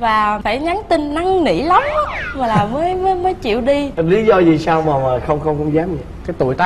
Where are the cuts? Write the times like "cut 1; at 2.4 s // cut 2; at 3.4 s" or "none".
none